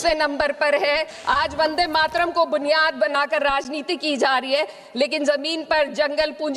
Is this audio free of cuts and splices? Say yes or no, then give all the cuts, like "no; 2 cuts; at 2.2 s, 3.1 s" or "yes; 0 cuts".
no; 1 cut; at 1.1 s